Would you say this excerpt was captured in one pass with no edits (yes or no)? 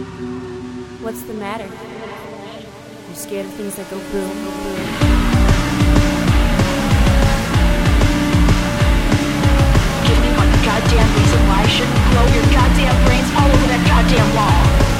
yes